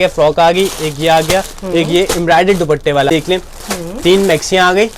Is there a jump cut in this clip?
yes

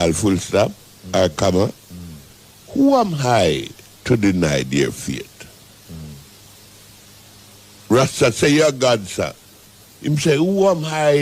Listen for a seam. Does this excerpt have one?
no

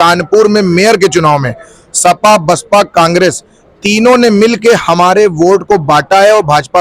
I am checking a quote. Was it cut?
no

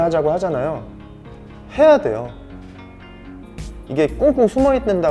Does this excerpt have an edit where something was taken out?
yes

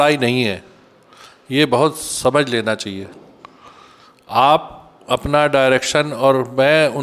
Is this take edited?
no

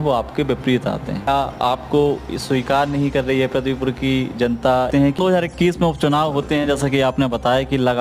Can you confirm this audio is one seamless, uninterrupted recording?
no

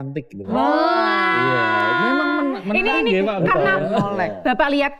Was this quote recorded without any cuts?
yes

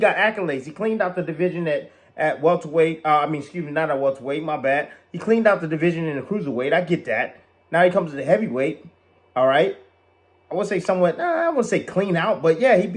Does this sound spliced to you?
no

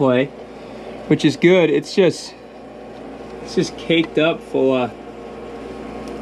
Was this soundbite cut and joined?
no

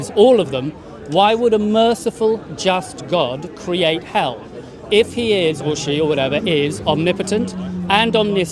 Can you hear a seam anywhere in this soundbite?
no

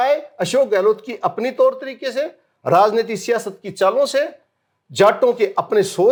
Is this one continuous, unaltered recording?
yes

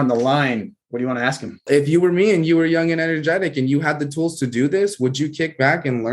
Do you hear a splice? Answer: yes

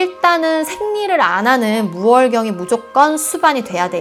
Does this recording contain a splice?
no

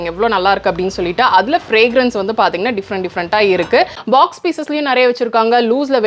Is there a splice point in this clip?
yes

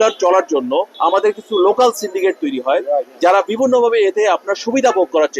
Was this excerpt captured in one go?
no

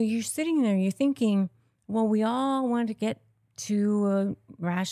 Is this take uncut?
yes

